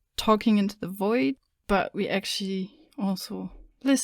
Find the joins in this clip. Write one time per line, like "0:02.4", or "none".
0:01.5